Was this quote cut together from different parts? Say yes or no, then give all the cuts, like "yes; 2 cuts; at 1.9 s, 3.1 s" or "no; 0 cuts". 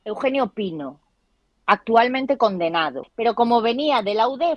yes; 1 cut; at 3.0 s